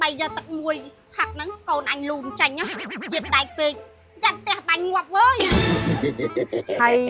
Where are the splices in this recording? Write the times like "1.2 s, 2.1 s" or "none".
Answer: none